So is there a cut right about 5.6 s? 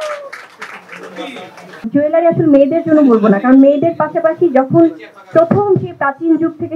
no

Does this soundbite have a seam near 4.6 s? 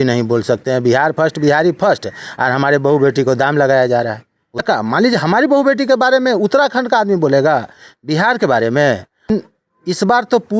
yes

